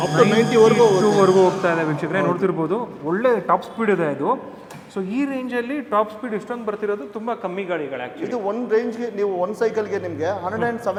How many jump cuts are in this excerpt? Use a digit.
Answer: 0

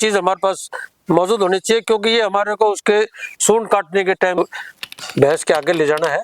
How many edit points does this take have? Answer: 1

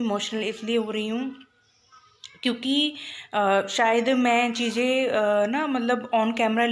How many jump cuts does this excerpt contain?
0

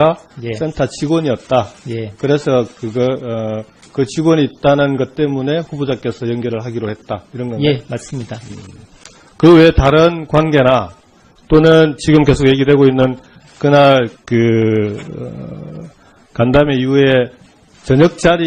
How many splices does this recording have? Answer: 1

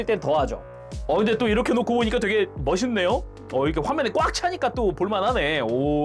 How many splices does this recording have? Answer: 0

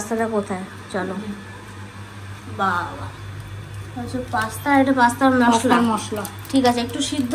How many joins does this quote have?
0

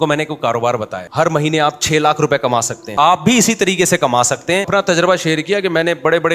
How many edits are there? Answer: 3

